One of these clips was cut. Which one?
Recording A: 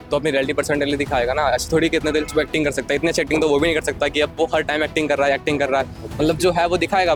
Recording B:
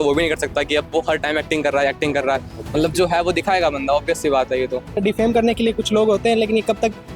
B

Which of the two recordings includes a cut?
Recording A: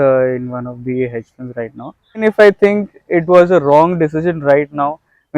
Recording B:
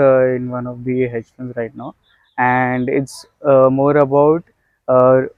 A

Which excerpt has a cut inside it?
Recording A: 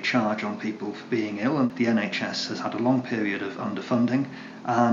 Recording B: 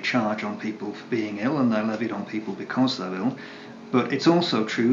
A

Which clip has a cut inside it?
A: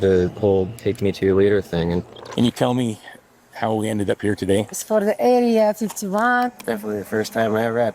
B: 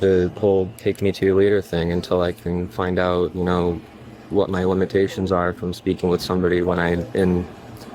A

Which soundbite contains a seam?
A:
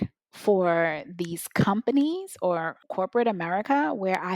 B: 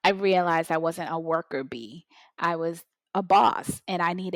A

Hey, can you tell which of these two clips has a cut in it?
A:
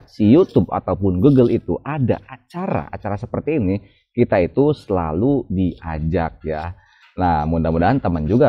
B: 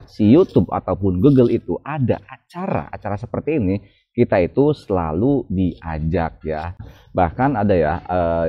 B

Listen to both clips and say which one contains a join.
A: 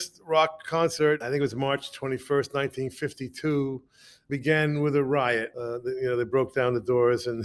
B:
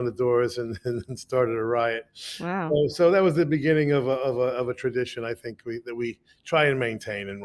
A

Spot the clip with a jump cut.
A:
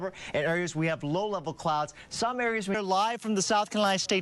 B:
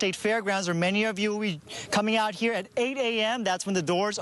A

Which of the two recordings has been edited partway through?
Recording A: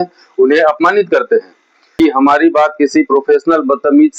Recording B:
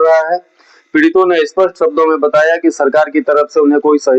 A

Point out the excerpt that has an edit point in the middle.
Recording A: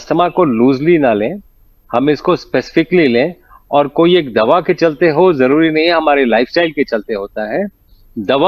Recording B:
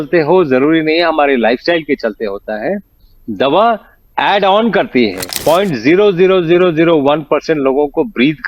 B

